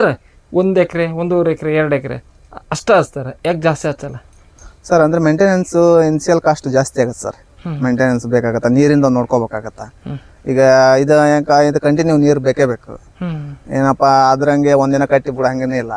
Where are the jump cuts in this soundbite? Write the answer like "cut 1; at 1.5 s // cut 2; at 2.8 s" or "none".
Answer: none